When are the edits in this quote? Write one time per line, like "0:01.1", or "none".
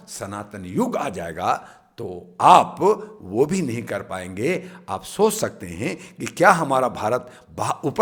none

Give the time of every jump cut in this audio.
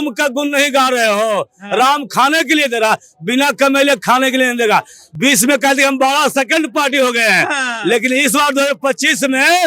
0:05.0

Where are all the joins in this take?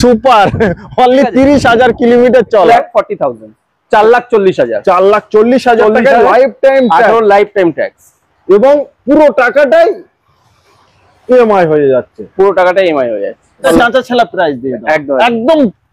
0:02.7
0:13.6

